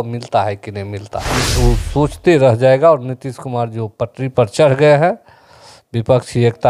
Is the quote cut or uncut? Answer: cut